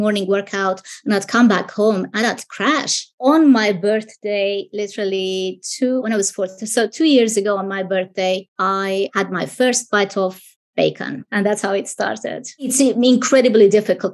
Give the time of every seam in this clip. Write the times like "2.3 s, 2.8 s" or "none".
3.2 s, 9.0 s, 11.2 s, 12.7 s